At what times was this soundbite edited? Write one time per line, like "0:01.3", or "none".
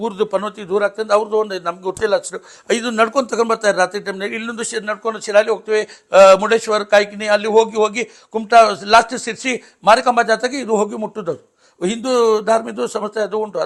none